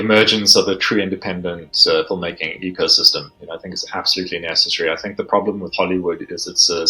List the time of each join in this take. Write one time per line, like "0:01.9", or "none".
none